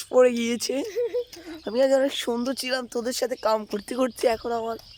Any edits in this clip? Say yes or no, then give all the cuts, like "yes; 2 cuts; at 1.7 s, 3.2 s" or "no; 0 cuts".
no; 0 cuts